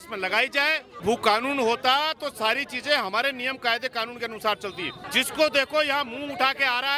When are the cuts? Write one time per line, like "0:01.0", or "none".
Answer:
0:01.0
0:05.0